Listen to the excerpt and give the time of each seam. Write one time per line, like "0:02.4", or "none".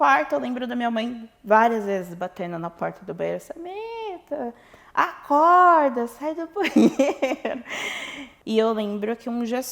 0:08.3